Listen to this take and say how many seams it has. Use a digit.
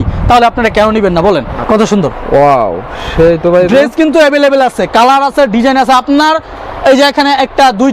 1